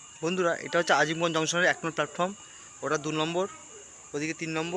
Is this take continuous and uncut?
yes; 0 cuts

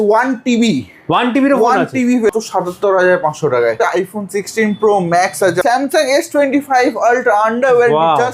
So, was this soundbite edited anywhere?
yes; 3 cuts; at 2.3 s, 3.8 s, 5.6 s

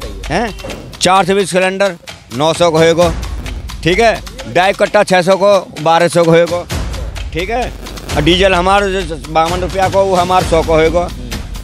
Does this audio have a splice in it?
no; 0 cuts

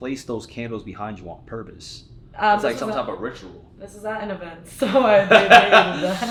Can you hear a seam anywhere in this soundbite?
no; 0 cuts

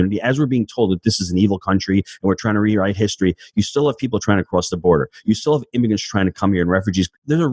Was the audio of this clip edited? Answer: no; 0 cuts

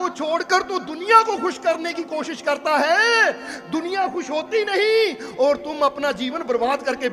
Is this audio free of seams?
yes; 0 cuts

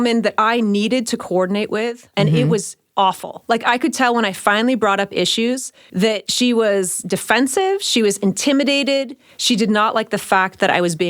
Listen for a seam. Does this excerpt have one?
yes; 3 cuts; at 2.0 s, 2.8 s, 6.0 s

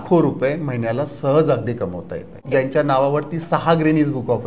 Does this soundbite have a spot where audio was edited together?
yes; 1 cut; at 2.3 s

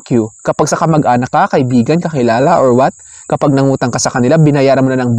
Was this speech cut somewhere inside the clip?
no; 0 cuts

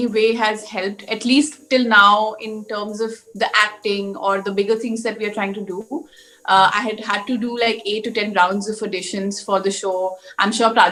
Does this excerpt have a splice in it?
no; 0 cuts

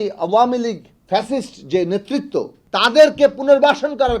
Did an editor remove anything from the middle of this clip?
yes; 2 cuts; at 0.9 s, 2.6 s

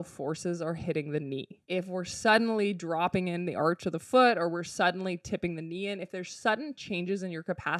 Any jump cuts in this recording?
yes; 1 cut; at 1.5 s

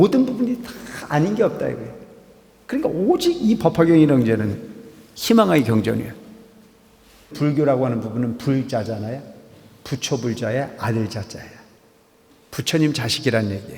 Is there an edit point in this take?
yes; 1 cut; at 7.3 s

